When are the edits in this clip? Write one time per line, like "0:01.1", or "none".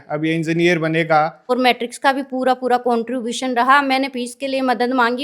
0:01.4